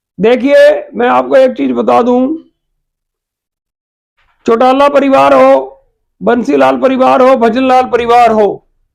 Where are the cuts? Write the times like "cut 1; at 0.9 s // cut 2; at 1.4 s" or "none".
none

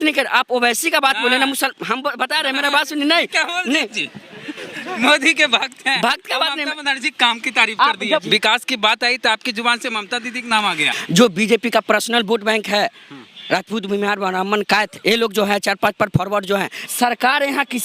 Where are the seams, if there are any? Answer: cut 1; at 8.2 s // cut 2; at 10.9 s // cut 3; at 16.8 s

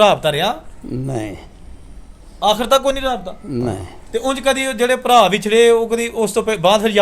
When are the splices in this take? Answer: cut 1; at 3.9 s

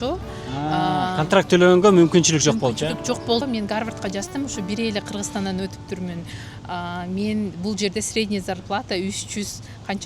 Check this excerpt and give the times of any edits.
cut 1; at 3.4 s

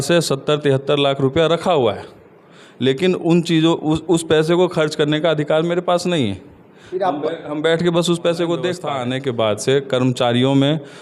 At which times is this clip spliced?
cut 1; at 8.9 s

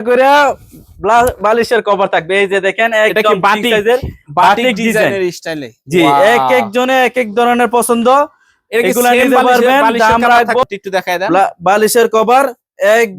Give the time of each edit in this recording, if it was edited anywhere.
cut 1; at 10.6 s

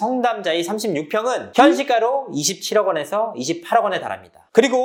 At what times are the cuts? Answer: none

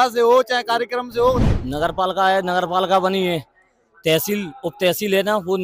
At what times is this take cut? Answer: cut 1; at 1.5 s

